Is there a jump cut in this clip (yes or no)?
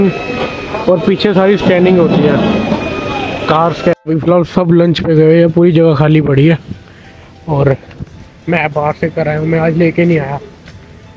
yes